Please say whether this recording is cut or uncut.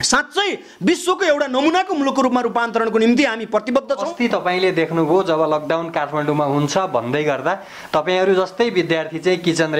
cut